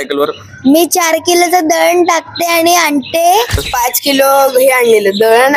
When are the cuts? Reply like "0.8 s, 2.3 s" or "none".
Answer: 3.7 s